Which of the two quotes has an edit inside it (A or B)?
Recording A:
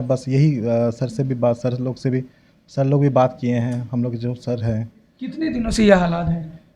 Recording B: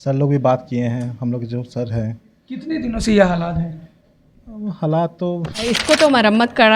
B